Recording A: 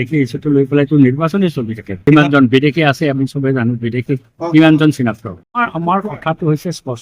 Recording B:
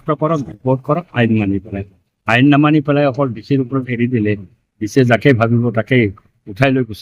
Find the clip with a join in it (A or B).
A